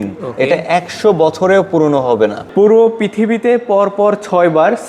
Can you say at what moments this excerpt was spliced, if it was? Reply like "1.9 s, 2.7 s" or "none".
2.4 s